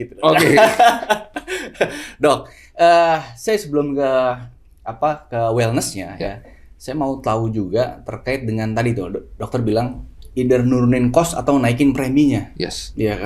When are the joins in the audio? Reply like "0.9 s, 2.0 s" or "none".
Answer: none